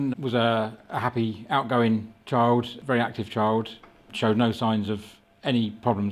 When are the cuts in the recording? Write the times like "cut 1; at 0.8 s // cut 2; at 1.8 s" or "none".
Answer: cut 1; at 2.8 s // cut 2; at 4.1 s